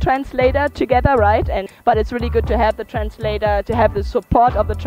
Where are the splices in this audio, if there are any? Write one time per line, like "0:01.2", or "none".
0:01.7

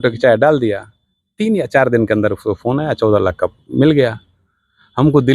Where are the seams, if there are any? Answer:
none

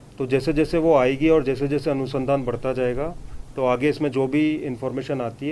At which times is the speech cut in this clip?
none

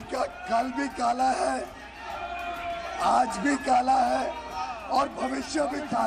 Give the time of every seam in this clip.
none

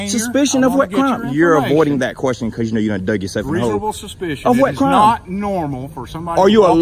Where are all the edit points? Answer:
none

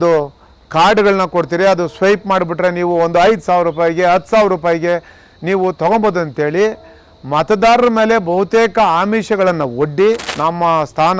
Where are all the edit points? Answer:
0:10.3

